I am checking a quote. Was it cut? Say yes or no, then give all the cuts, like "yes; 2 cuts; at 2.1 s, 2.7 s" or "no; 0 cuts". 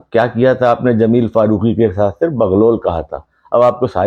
no; 0 cuts